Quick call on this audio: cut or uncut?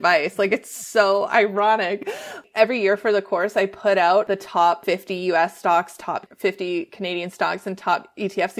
cut